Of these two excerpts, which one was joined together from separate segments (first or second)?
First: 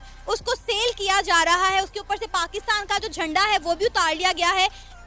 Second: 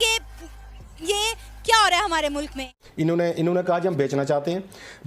second